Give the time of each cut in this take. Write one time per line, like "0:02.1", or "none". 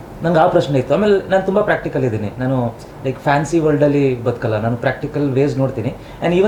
none